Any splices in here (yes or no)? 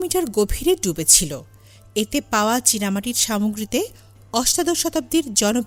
no